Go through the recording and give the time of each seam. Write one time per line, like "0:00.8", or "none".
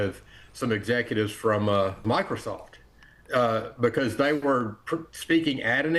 0:02.0